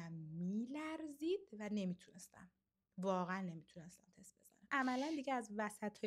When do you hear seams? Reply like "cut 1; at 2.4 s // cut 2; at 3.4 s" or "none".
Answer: cut 1; at 4.7 s